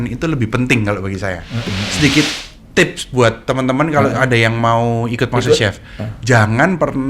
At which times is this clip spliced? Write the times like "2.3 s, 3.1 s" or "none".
1.8 s